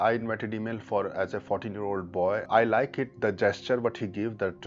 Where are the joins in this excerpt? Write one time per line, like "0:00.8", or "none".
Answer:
0:02.5